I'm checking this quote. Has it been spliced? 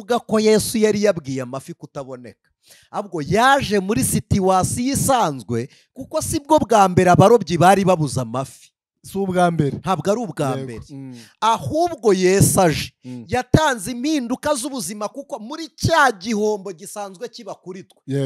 no; 0 cuts

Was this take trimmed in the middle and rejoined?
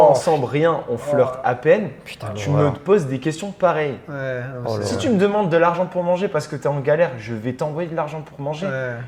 no; 0 cuts

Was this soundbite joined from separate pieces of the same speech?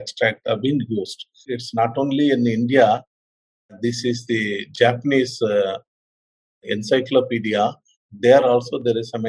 yes; 1 cut; at 1.5 s

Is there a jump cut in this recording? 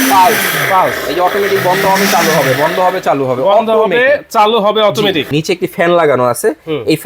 yes; 1 cut; at 5.3 s

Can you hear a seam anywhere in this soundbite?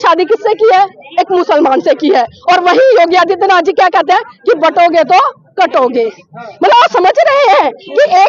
no; 0 cuts

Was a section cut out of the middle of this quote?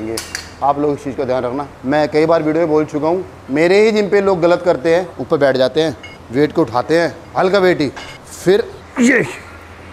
yes; 2 cuts; at 1.7 s, 5.1 s

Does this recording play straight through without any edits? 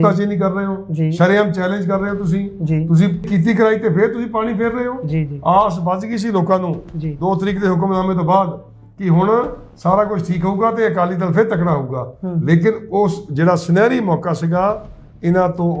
no; 1 cut; at 3.3 s

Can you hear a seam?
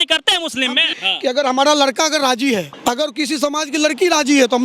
yes; 2 cuts; at 0.9 s, 2.7 s

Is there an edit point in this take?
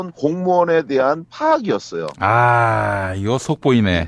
yes; 1 cut; at 3.1 s

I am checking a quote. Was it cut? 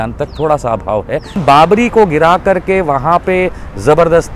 yes; 1 cut; at 1.4 s

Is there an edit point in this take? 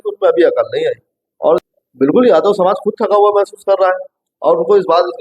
yes; 1 cut; at 1.6 s

